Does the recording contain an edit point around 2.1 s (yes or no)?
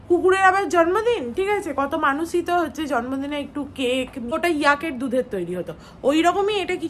no